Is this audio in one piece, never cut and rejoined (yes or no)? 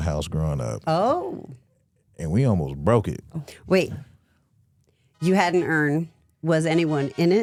yes